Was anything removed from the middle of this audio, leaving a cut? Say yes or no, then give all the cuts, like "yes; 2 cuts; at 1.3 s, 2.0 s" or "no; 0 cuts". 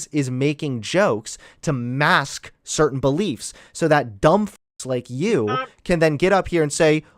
no; 0 cuts